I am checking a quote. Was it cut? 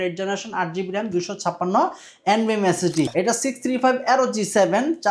yes; 1 cut; at 3.1 s

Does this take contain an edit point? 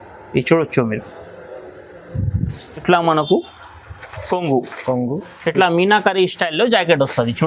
yes; 1 cut; at 2.8 s

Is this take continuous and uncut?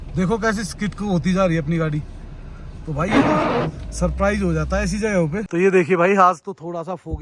no; 1 cut; at 5.5 s

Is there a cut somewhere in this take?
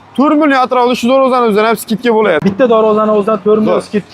yes; 1 cut; at 2.4 s

